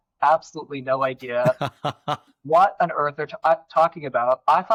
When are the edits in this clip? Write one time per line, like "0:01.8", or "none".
none